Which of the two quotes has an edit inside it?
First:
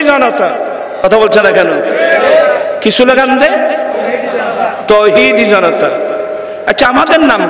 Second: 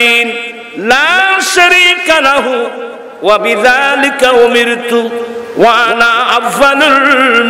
first; 1 cut; at 1.0 s

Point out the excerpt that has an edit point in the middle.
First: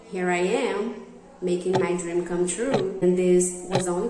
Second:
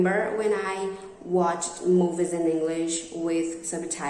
first; 1 cut; at 3.0 s

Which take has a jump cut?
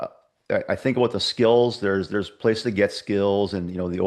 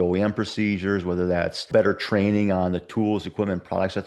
second; 1 cut; at 1.7 s

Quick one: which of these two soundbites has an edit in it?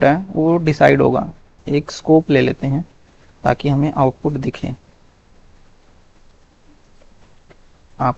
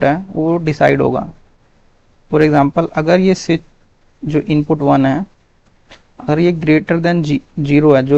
first; 1 cut; at 1.5 s

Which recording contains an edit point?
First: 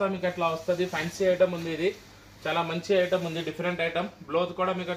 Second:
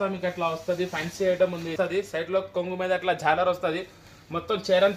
second; 1 cut; at 1.7 s

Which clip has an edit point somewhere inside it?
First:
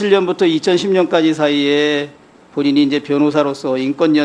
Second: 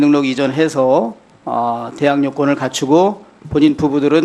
second; 1 cut; at 2.6 s

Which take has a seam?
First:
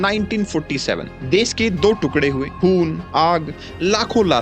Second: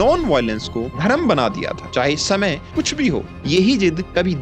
first; 1 cut; at 1.1 s

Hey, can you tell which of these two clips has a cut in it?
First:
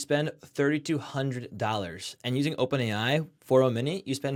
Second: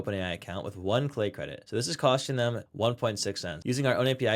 second; 3 cuts; at 1.5 s, 2.6 s, 3.5 s

